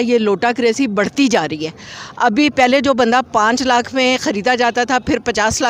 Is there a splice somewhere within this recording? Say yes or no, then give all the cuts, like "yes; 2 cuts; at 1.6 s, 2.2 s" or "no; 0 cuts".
no; 0 cuts